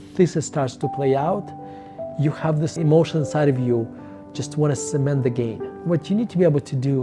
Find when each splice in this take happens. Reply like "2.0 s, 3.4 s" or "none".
5.7 s